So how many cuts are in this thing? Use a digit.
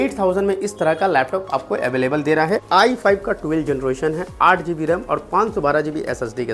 1